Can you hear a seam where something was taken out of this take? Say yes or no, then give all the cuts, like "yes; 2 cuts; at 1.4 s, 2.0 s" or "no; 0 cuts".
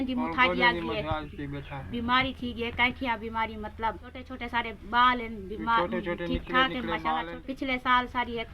yes; 2 cuts; at 4.3 s, 7.3 s